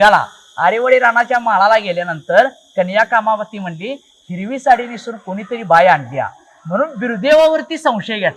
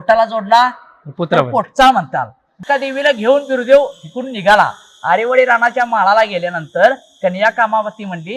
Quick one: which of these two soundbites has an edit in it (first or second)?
second